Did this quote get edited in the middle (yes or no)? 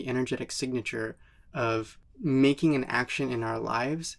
yes